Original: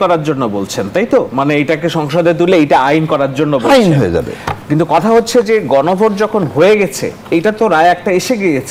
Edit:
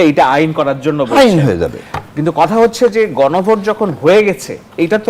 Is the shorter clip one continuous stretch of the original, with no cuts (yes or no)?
yes